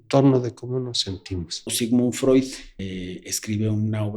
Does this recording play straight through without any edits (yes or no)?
no